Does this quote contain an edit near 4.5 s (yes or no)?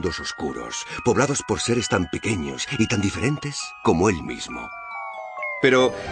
yes